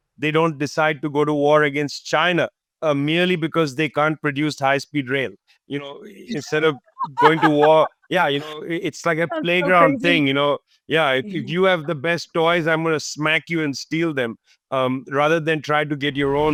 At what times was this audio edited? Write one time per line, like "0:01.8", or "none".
none

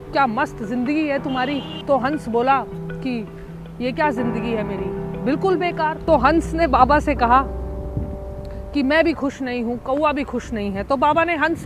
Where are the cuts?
0:01.7
0:06.0

